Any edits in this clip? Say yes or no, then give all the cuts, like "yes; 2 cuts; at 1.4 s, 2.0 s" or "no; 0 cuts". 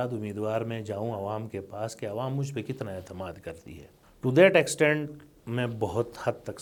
no; 0 cuts